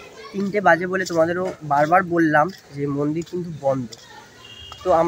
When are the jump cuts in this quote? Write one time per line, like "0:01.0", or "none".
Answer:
none